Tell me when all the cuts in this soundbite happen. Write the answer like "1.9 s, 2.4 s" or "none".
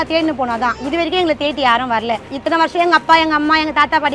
2.3 s